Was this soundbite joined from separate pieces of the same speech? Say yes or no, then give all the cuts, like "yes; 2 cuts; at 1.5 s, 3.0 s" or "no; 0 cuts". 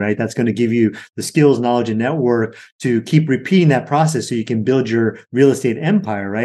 no; 0 cuts